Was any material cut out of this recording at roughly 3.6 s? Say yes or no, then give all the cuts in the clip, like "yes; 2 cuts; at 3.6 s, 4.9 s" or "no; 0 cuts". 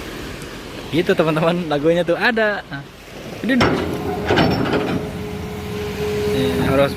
yes; 1 cut; at 3.6 s